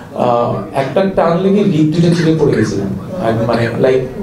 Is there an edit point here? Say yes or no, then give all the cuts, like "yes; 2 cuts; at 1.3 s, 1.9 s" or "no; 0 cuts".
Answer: no; 0 cuts